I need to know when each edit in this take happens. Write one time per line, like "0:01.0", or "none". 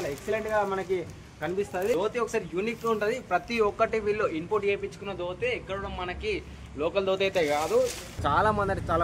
0:01.9
0:08.1